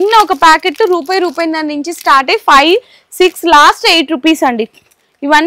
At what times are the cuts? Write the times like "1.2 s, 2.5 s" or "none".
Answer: none